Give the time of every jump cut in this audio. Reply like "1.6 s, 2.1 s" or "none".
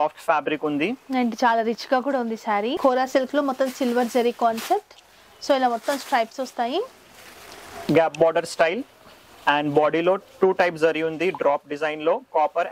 2.8 s, 7.8 s